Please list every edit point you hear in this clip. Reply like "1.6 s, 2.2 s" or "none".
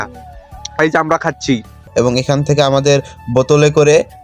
1.9 s

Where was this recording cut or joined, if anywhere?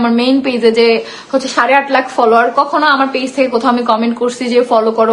none

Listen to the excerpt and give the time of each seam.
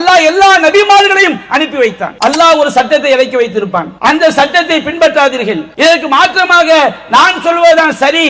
2.1 s, 3.9 s, 5.7 s

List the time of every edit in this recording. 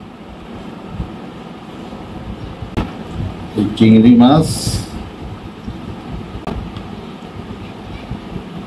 2.8 s

